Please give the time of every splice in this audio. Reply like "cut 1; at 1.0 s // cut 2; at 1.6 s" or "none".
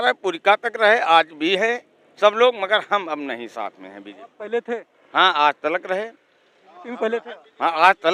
none